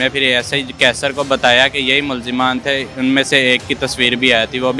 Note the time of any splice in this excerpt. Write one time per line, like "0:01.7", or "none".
none